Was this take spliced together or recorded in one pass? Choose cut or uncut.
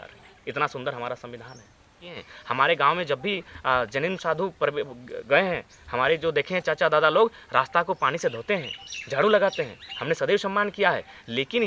cut